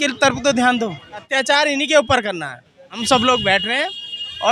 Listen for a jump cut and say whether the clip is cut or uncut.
cut